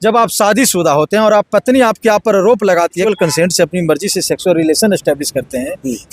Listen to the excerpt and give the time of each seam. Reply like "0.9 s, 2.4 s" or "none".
3.1 s